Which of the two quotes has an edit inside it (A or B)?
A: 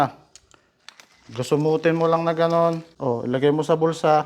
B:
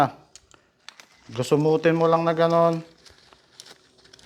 A